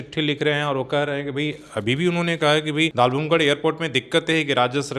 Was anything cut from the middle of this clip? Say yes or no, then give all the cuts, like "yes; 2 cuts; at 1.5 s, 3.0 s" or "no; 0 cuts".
yes; 1 cut; at 2.9 s